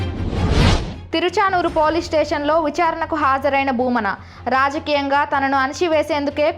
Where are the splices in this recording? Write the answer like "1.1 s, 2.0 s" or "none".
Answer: 1.0 s